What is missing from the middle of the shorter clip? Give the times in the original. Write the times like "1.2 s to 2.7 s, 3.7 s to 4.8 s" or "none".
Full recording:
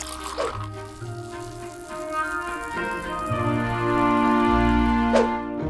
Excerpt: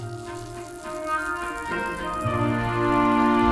none